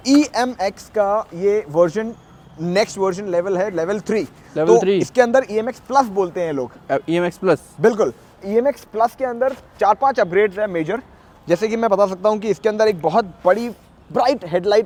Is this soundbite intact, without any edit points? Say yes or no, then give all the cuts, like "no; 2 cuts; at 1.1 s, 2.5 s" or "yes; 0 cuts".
yes; 0 cuts